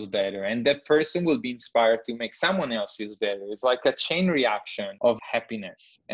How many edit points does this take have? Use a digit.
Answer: 1